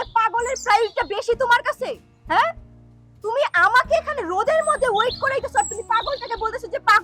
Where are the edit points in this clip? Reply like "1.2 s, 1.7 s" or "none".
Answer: none